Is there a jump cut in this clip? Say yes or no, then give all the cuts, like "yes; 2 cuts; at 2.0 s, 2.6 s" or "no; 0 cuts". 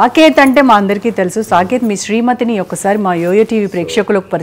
no; 0 cuts